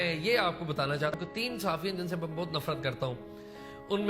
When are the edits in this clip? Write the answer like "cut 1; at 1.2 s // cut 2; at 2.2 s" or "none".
cut 1; at 1.2 s

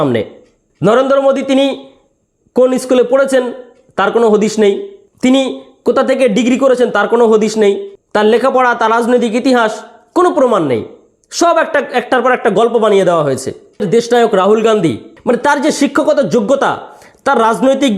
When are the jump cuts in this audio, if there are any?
cut 1; at 13.9 s // cut 2; at 15.1 s

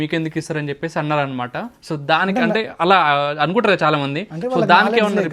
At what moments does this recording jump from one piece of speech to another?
none

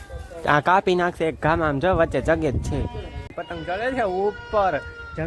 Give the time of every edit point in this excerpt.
cut 1; at 3.5 s

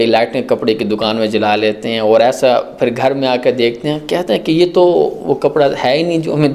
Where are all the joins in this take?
none

